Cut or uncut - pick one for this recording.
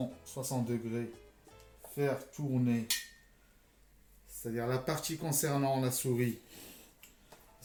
uncut